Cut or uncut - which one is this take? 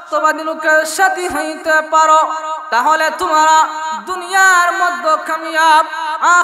uncut